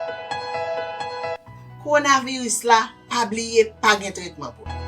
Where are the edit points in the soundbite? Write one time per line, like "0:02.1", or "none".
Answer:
0:01.0

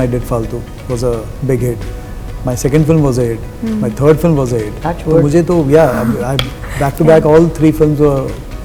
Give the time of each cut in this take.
none

